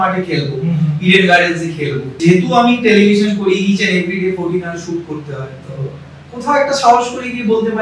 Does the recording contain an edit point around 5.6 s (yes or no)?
no